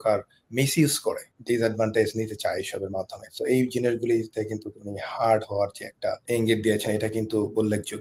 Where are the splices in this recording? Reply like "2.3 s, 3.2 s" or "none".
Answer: 1.3 s, 6.2 s